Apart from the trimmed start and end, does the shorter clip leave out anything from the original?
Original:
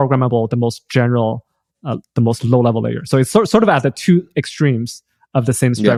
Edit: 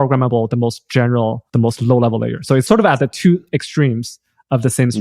yes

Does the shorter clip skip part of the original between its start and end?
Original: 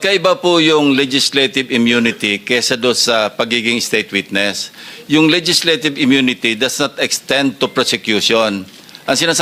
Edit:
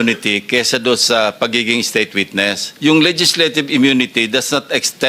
yes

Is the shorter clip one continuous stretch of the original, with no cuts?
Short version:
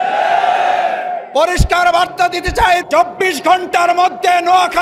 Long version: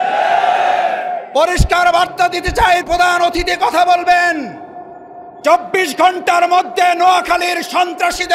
no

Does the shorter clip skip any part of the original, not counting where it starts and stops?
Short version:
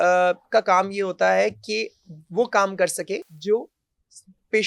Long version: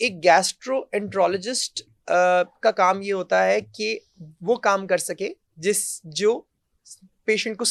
yes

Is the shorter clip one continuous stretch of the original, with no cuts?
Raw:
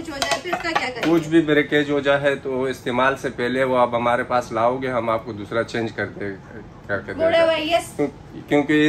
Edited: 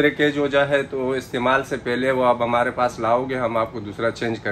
yes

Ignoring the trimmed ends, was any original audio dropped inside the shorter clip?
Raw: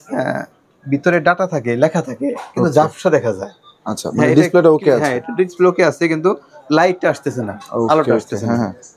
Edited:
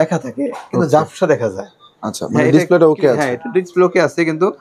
no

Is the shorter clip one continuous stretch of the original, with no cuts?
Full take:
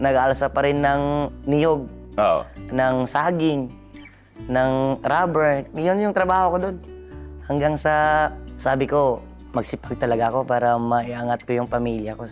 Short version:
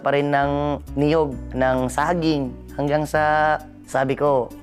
no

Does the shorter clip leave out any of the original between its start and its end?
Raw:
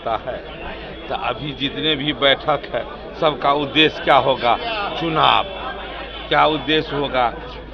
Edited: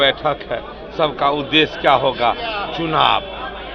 no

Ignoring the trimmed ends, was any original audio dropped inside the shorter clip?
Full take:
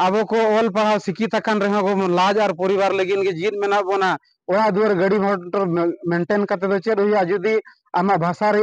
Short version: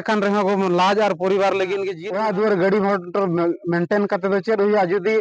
yes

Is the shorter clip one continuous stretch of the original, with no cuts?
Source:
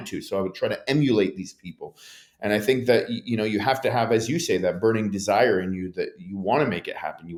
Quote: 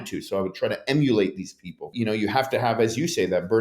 no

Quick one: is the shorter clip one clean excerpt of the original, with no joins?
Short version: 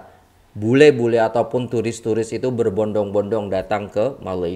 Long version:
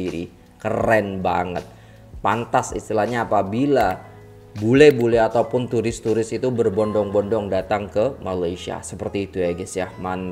yes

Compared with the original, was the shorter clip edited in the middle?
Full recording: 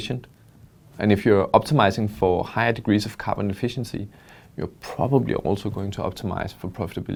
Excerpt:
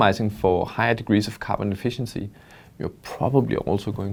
no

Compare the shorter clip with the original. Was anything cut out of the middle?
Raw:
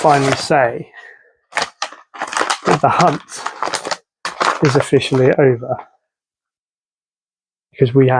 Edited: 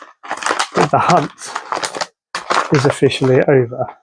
no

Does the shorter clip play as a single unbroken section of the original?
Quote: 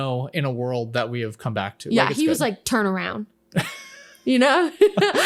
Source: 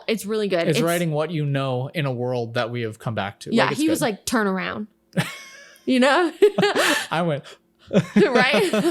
yes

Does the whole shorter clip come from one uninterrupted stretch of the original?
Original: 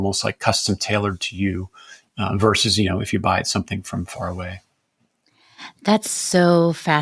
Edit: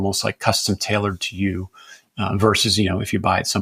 yes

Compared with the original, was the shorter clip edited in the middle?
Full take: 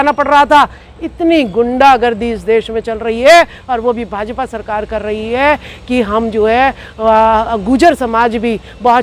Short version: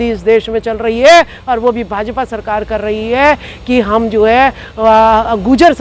no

